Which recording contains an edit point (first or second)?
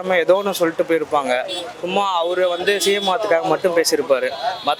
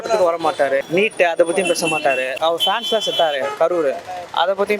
second